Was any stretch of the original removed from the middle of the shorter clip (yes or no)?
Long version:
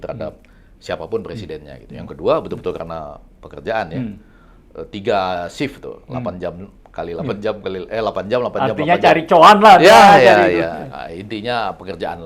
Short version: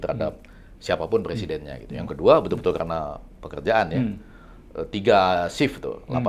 no